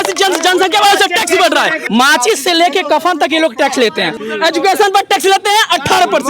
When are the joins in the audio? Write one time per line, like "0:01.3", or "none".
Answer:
0:01.8
0:04.2